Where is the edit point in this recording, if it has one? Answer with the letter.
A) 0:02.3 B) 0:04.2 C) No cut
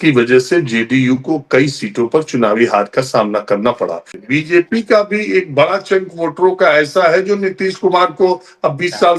B